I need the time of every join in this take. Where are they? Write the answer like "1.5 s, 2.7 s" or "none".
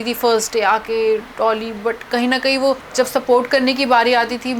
2.9 s